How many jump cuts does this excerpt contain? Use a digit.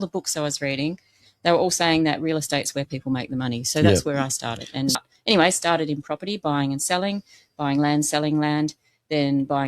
1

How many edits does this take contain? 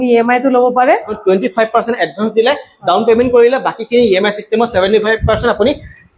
1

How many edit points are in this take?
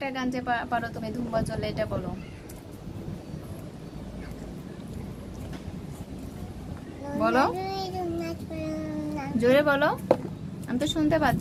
0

